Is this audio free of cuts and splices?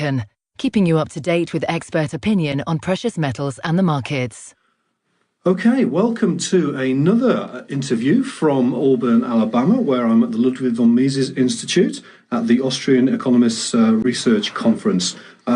no; 1 cut; at 9.4 s

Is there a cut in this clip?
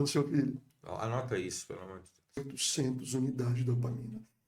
yes; 1 cut; at 2.4 s

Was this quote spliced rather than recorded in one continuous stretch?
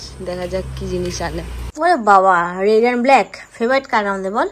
yes; 1 cut; at 1.6 s

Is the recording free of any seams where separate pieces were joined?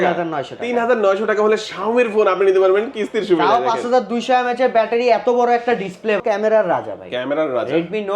no; 1 cut; at 6.2 s

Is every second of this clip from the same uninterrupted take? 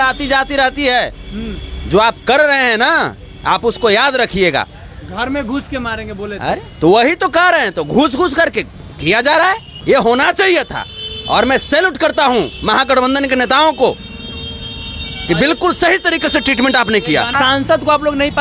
no; 2 cuts; at 9.7 s, 17.3 s

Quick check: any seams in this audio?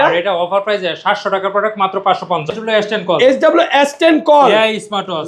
yes; 1 cut; at 2.5 s

